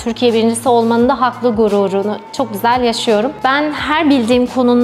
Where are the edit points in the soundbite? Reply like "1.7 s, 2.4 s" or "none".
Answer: 3.3 s